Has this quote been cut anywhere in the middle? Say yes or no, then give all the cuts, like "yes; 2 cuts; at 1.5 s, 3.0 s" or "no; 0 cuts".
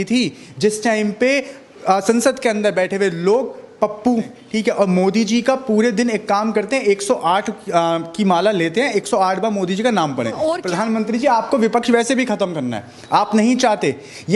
yes; 2 cuts; at 4.4 s, 10.6 s